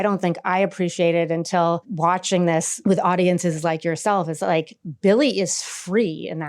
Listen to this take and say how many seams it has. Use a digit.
2